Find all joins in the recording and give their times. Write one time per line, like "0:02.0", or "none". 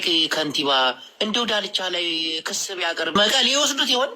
0:03.2